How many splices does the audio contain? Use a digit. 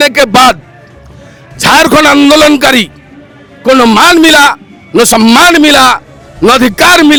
0